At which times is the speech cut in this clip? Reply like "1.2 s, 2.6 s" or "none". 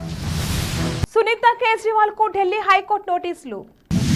none